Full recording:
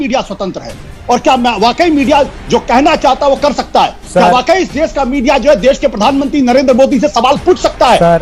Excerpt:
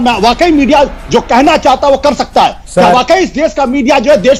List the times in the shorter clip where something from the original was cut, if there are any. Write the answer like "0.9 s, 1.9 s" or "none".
none